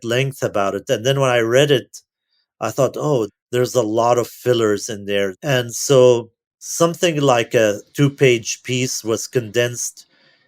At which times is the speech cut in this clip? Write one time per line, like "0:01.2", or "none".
0:05.4